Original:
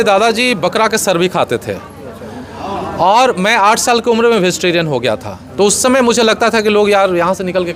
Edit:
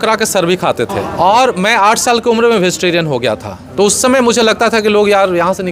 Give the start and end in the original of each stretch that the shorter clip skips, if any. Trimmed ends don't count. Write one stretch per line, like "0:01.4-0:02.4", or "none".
0:01.7-0:02.8